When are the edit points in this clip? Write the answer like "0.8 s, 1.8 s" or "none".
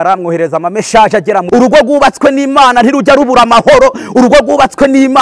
1.5 s